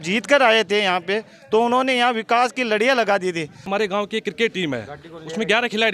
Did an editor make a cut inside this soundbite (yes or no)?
yes